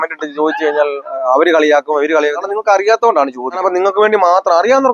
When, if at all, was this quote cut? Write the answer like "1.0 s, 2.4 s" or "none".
2.4 s, 3.6 s